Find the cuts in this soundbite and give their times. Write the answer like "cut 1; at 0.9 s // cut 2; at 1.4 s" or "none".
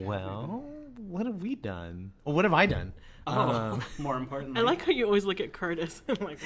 none

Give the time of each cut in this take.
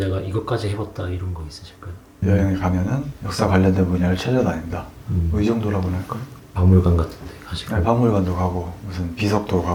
none

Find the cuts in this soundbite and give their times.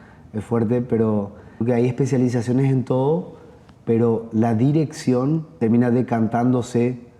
cut 1; at 1.6 s

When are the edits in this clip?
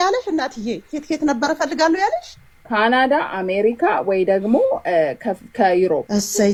none

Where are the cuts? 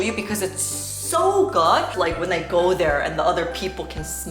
cut 1; at 1.9 s

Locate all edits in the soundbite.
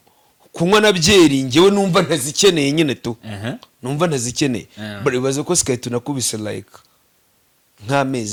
none

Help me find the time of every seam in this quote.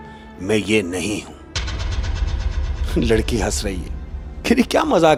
none

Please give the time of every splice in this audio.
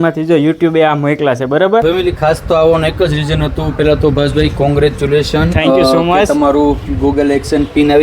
cut 1; at 1.8 s

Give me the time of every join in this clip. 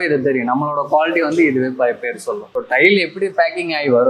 cut 1; at 2.6 s

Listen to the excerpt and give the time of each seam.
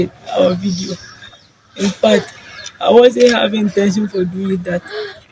none

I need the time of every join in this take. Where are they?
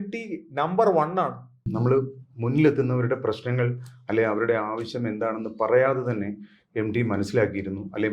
cut 1; at 1.7 s

